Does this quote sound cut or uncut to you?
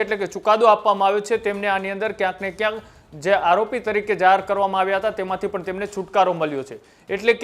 uncut